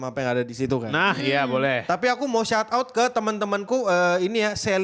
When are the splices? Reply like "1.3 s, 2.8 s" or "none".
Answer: none